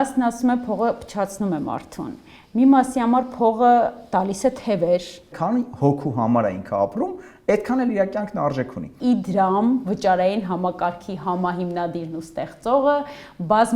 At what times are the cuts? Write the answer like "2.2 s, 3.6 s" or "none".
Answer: 5.3 s, 8.9 s